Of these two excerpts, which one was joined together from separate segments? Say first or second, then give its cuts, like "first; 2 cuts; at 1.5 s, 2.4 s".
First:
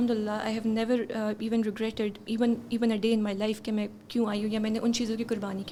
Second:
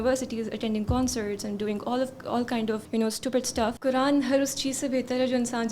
second; 2 cuts; at 2.8 s, 3.8 s